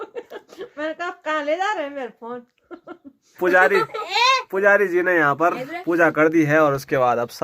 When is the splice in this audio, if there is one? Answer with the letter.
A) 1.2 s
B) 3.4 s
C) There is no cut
B